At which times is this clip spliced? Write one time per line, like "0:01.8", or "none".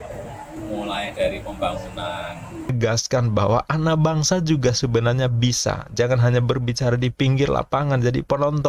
0:02.7